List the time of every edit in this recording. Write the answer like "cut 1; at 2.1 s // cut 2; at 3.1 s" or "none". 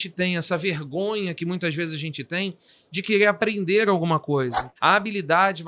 cut 1; at 4.6 s